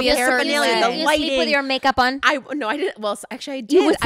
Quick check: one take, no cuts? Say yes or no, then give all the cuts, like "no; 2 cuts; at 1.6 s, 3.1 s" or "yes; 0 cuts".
yes; 0 cuts